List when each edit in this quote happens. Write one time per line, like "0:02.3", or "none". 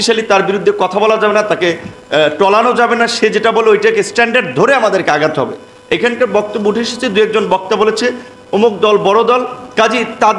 none